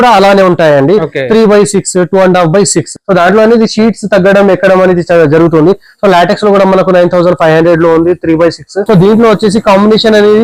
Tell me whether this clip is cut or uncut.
cut